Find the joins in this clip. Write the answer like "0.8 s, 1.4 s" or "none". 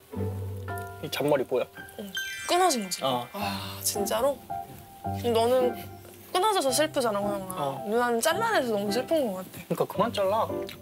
none